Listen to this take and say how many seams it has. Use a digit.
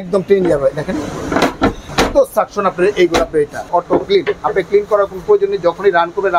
2